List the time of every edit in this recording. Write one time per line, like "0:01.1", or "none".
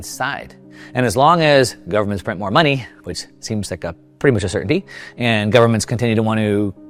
none